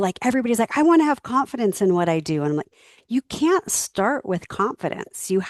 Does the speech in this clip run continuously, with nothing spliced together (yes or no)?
yes